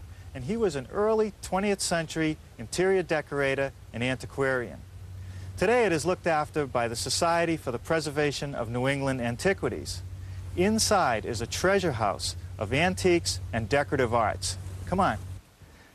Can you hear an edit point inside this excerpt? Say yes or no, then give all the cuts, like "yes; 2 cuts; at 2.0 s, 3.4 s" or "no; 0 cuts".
yes; 1 cut; at 12.0 s